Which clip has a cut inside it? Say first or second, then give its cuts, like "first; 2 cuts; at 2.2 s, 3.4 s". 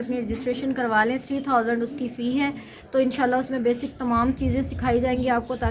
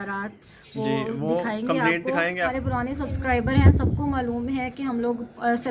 second; 1 cut; at 2.5 s